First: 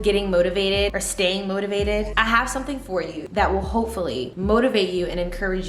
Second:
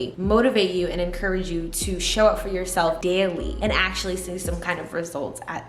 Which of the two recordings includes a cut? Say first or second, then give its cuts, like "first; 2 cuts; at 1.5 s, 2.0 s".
first; 3 cuts; at 1.0 s, 2.1 s, 3.2 s